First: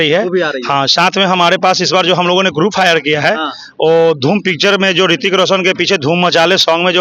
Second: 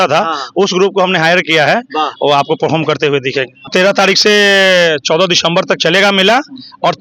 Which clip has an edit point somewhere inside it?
second; 1 cut; at 3.7 s

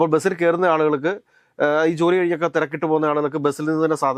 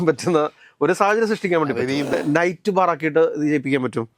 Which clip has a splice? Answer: second; 1 cut; at 2.1 s

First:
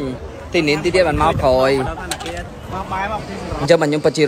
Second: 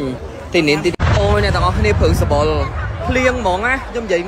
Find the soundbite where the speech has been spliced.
second; 1 cut; at 0.9 s

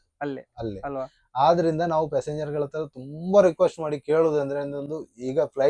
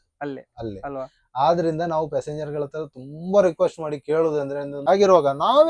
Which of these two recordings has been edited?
second; 1 cut; at 4.8 s

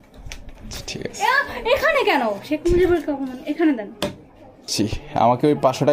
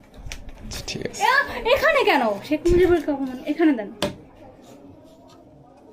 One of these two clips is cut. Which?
first; 1 cut; at 4.7 s

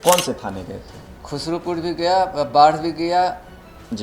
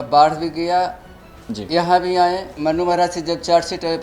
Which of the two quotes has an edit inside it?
second; 1 cut; at 2.5 s

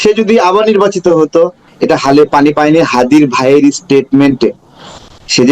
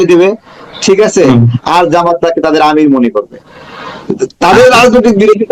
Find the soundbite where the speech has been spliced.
first; 1 cut; at 1.7 s

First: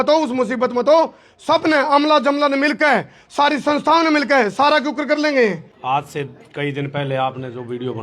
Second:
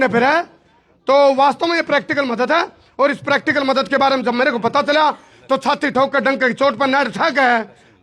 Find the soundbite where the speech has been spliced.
first; 1 cut; at 5.7 s

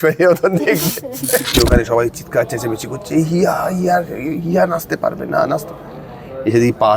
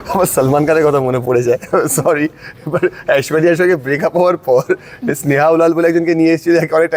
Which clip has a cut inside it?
first; 1 cut; at 1.5 s

